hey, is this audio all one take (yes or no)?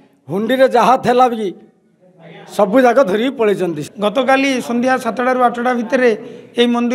no